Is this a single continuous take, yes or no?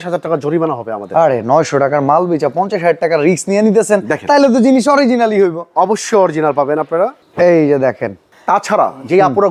yes